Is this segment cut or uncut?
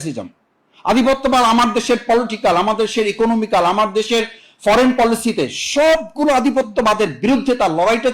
uncut